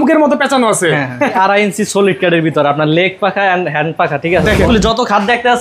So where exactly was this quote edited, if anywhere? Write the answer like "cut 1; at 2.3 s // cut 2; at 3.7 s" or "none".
cut 1; at 1.4 s // cut 2; at 4.7 s

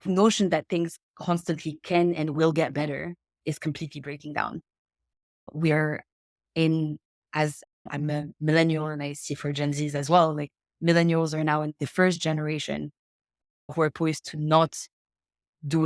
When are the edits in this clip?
cut 1; at 3.3 s

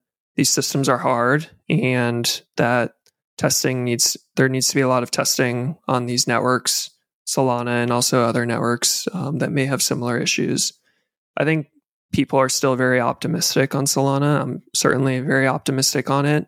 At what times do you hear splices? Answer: none

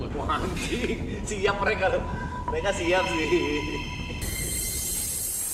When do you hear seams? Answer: none

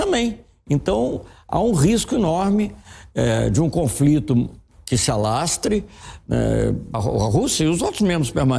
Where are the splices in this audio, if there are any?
cut 1; at 7.0 s

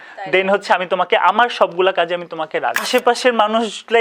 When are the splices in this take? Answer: cut 1; at 2.8 s

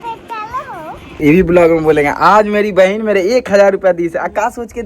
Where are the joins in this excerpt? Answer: cut 1; at 1.2 s

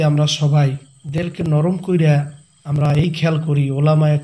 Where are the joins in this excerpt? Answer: cut 1; at 1.4 s // cut 2; at 2.5 s

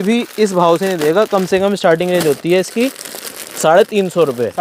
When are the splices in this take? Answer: none

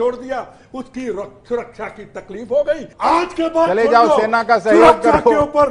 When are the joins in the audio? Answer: cut 1; at 2.9 s

